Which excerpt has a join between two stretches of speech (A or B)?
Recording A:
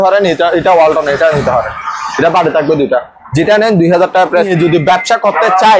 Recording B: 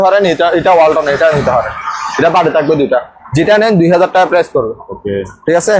A